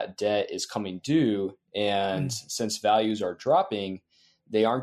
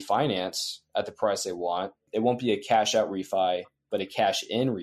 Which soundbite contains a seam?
second; 1 cut; at 2.0 s

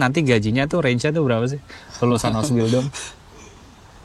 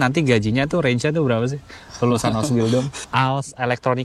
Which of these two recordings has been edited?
second; 1 cut; at 3.0 s

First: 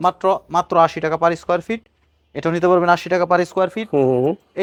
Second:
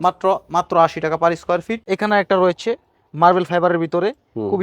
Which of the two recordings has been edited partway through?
second; 1 cut; at 1.8 s

